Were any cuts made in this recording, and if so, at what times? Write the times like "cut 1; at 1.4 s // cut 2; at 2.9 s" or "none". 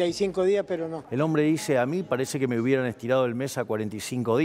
cut 1; at 1.0 s